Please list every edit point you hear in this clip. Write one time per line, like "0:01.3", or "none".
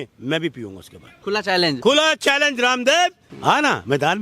0:01.1
0:03.3